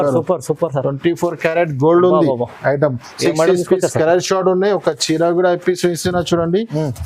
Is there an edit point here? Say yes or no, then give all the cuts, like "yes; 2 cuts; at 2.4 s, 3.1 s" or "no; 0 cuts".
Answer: no; 0 cuts